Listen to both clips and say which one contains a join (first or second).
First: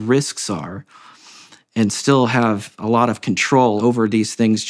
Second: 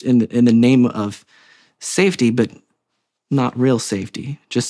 first